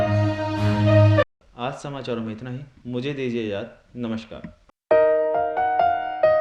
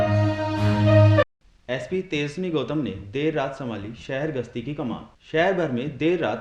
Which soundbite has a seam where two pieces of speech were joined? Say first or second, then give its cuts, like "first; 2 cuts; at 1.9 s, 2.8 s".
second; 1 cut; at 1.4 s